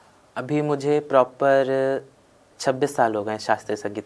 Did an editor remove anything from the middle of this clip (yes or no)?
no